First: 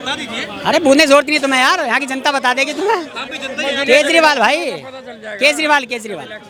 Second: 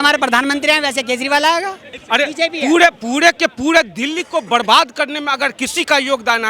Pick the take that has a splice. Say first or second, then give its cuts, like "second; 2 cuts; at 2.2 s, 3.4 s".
second; 1 cut; at 2.0 s